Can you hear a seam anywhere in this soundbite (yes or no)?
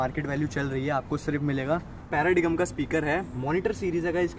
yes